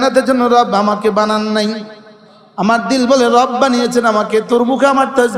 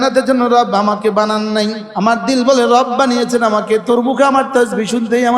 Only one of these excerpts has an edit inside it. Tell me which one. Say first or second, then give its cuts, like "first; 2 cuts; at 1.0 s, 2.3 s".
second; 1 cut; at 1.8 s